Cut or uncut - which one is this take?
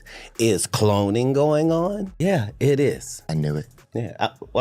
cut